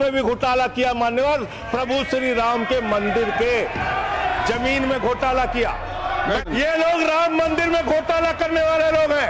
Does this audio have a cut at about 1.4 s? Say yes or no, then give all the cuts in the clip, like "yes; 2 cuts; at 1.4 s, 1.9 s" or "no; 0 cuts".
no; 1 cut; at 6.5 s